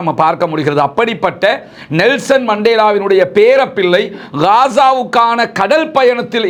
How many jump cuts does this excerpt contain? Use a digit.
0